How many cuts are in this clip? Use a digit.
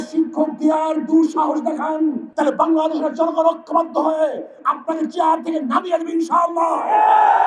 1